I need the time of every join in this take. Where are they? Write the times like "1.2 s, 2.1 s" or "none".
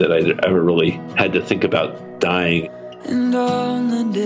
1.1 s, 2.6 s